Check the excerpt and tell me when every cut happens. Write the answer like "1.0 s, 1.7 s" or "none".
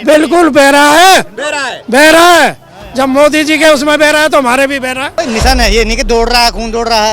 5.1 s